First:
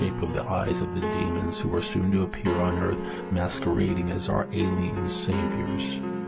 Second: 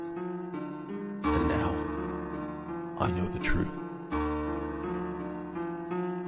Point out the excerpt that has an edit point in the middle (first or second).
first